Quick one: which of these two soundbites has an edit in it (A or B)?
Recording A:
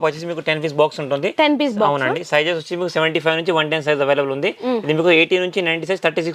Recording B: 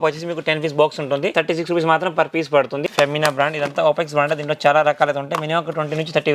B